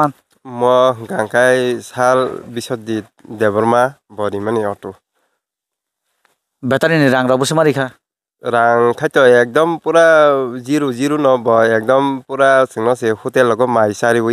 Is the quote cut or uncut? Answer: uncut